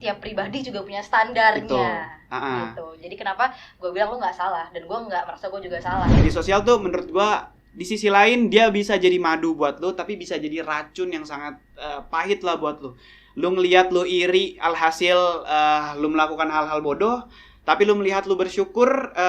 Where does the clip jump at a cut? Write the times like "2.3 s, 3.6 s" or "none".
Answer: 6.1 s